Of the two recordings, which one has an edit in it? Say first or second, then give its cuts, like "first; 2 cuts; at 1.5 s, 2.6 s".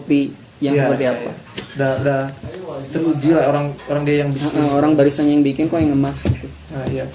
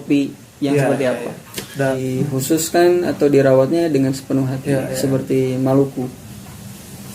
second; 1 cut; at 2.0 s